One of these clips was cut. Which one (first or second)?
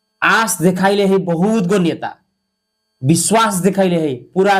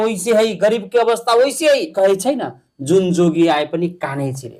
second